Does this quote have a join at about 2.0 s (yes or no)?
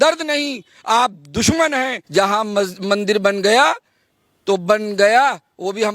yes